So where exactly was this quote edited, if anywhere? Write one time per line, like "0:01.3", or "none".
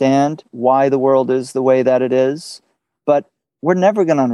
0:03.4

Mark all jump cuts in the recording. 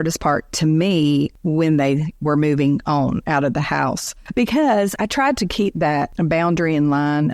0:01.4
0:04.1
0:04.9
0:06.1

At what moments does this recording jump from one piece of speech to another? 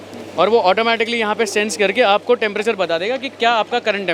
none

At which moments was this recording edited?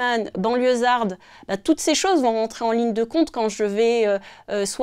none

